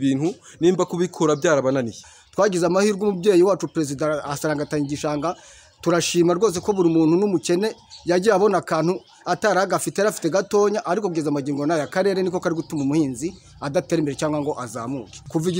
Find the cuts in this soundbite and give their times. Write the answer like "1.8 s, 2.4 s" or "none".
2.0 s